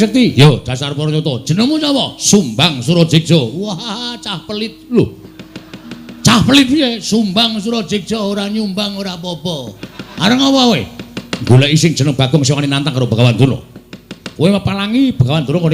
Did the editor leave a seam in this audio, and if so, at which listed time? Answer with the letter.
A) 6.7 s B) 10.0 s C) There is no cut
B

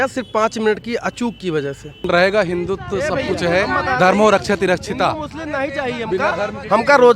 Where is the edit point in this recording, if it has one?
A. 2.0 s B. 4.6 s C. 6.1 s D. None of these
A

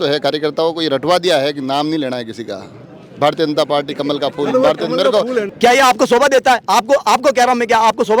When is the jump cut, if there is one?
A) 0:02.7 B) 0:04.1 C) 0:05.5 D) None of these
C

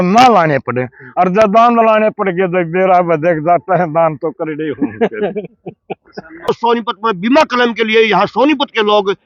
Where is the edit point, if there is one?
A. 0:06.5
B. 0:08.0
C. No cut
A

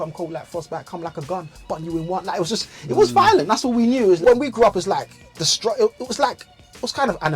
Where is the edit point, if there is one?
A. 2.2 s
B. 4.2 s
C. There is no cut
B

